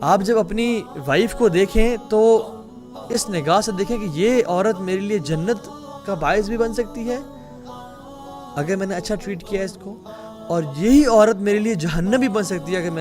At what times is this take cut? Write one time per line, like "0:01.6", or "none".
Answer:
0:07.3
0:08.5